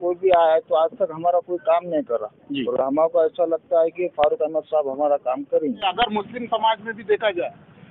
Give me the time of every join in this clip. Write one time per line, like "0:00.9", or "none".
0:05.8